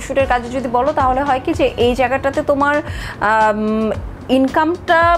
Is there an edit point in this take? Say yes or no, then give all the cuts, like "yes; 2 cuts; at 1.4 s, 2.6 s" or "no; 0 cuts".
no; 0 cuts